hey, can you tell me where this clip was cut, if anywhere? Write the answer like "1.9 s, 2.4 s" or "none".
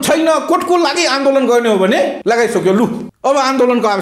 2.2 s, 3.1 s